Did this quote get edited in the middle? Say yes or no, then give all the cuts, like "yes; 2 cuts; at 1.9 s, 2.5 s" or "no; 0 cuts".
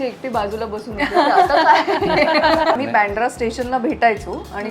yes; 1 cut; at 2.8 s